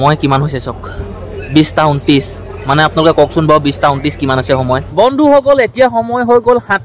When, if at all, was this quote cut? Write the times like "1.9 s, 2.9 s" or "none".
4.9 s